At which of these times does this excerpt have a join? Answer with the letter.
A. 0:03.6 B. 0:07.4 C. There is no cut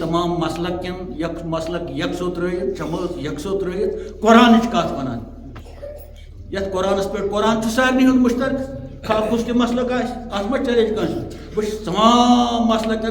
C